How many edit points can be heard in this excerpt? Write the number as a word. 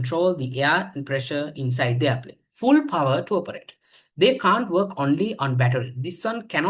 one